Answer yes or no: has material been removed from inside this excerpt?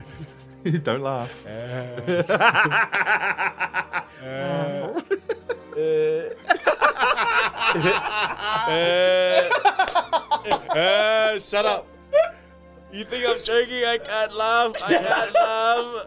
no